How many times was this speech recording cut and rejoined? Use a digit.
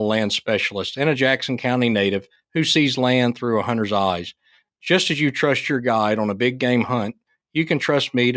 1